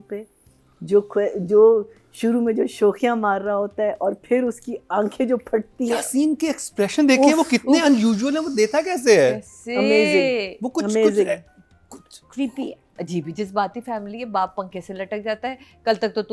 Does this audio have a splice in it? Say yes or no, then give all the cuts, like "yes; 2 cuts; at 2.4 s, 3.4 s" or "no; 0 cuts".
yes; 1 cut; at 12.8 s